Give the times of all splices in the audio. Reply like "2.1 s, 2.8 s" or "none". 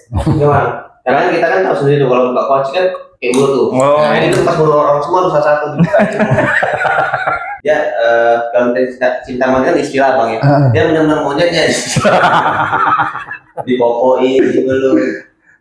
7.5 s